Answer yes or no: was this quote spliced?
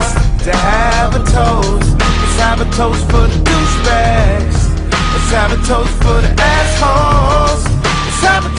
no